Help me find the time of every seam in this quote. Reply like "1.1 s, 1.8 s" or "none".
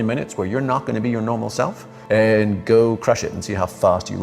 1.9 s

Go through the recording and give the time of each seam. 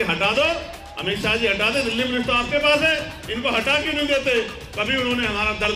none

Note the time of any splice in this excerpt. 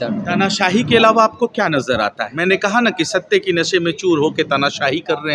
2.3 s

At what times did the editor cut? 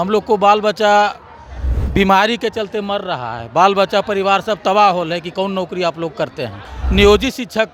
6.8 s

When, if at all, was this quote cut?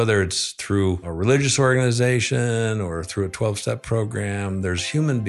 1.1 s

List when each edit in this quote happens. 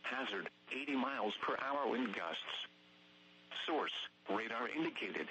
1.1 s

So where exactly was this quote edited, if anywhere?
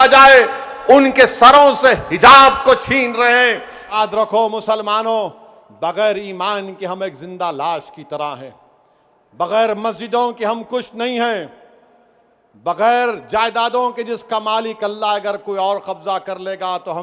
3.9 s

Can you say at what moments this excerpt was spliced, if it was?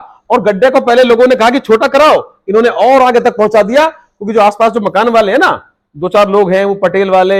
none

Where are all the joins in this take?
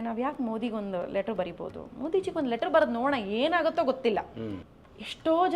4.6 s

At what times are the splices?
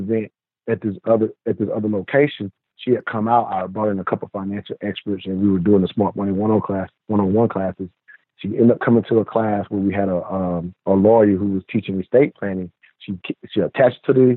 none

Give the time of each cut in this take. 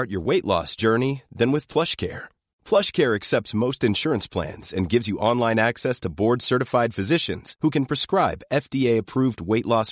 none

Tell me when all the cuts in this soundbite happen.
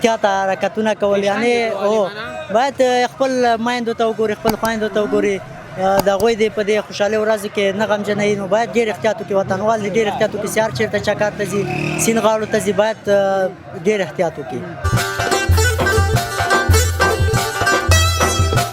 14.8 s

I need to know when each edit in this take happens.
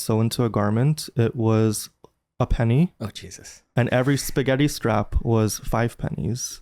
none

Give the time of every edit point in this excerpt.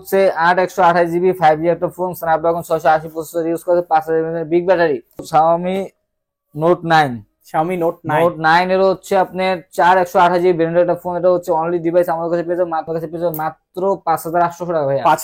5.2 s, 12.9 s

